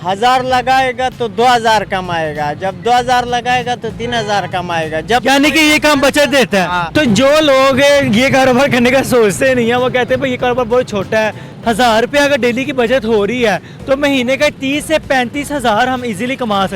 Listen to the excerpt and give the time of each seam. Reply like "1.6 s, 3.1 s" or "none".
6.8 s, 11.5 s